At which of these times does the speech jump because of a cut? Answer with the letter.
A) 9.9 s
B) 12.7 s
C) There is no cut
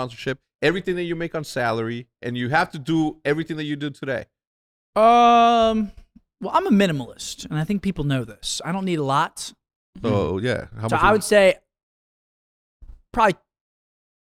A